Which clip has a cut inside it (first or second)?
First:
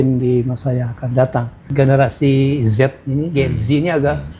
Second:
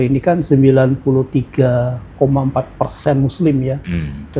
first